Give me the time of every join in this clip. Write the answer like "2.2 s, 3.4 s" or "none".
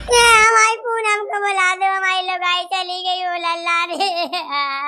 none